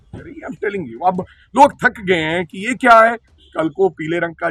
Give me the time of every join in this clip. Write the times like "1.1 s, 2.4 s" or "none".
none

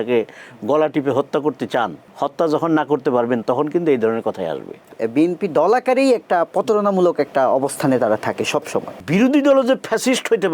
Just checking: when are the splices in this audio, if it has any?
2.0 s, 5.0 s, 9.0 s

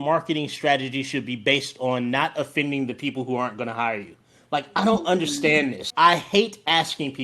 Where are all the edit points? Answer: 5.8 s

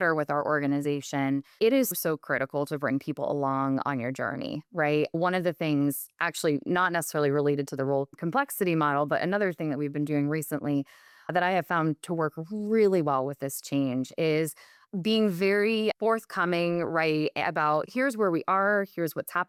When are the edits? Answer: none

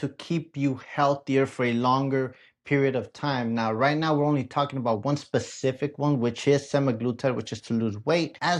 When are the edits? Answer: none

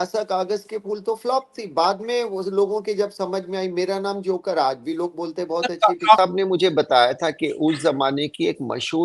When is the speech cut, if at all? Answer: 6.2 s

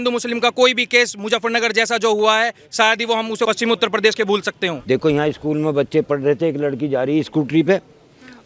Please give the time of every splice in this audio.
3.5 s, 4.8 s

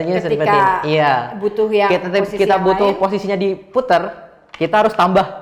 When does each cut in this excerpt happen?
none

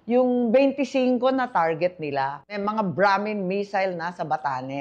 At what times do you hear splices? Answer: 2.6 s

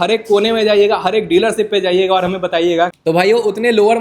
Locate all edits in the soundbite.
3.1 s

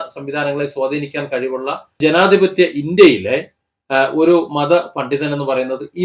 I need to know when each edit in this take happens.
2.0 s

